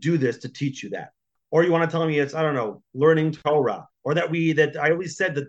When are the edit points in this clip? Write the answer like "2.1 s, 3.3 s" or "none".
1.4 s, 3.4 s

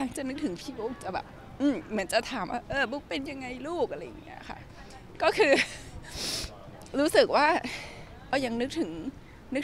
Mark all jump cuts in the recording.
8.3 s

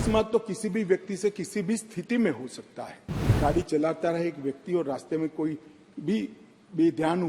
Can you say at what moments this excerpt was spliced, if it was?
3.4 s

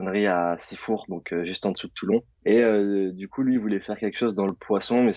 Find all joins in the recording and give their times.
2.3 s

